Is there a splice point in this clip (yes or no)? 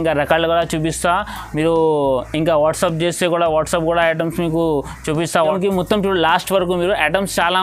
yes